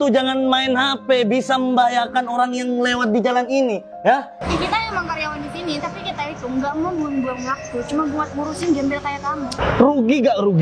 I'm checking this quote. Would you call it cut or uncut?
cut